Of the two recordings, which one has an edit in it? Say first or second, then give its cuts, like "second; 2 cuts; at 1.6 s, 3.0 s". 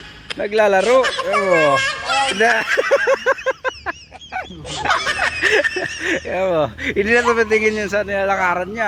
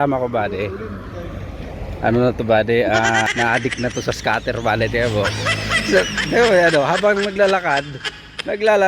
second; 1 cut; at 3.3 s